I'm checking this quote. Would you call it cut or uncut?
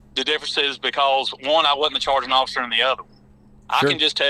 uncut